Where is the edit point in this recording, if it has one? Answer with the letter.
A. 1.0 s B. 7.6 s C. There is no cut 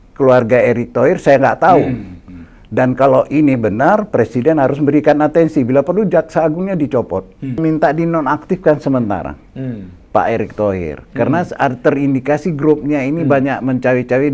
B